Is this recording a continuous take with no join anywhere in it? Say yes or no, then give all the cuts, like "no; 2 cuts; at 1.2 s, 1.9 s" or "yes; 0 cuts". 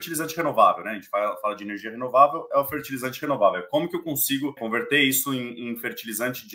no; 1 cut; at 4.6 s